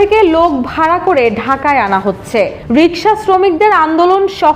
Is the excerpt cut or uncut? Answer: uncut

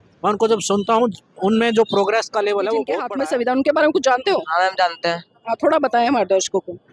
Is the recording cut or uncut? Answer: cut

